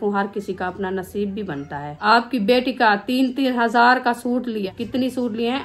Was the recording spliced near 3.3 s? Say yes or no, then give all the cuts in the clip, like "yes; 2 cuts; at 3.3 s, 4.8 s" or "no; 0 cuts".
no; 2 cuts; at 2.0 s, 4.7 s